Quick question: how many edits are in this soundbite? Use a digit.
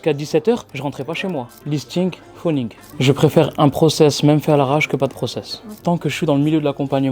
2